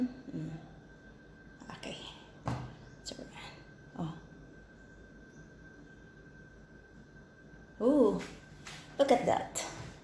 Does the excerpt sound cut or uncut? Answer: uncut